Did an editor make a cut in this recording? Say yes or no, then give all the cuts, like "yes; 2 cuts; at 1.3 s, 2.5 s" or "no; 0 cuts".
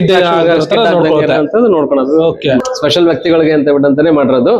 yes; 1 cut; at 2.6 s